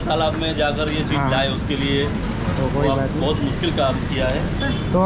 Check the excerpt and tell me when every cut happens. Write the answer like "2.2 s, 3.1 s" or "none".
none